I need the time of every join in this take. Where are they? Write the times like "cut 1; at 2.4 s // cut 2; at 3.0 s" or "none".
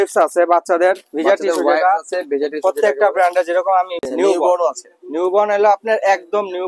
cut 1; at 4.0 s

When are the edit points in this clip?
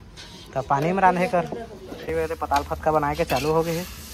cut 1; at 1.9 s

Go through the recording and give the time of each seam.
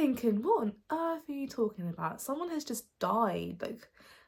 none

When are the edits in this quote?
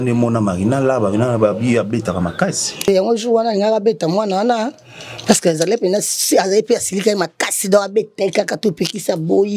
cut 1; at 2.8 s

